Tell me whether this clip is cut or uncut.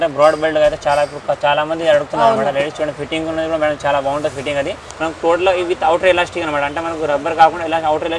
cut